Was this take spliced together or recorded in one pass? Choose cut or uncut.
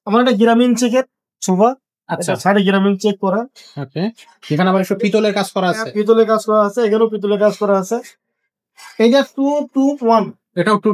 uncut